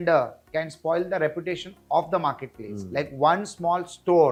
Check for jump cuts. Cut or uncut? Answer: uncut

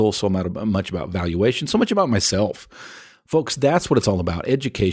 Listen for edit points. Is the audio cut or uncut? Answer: uncut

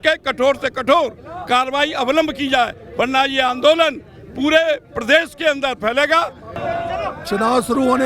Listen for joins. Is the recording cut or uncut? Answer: cut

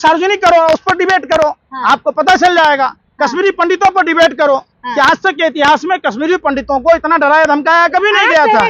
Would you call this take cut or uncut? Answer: uncut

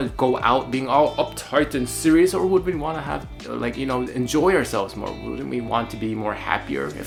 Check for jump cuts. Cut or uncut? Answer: uncut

